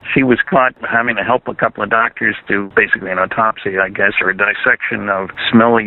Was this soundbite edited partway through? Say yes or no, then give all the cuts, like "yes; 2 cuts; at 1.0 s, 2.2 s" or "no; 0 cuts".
no; 0 cuts